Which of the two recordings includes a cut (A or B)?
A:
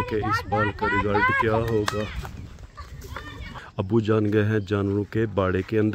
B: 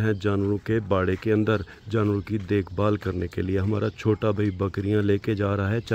A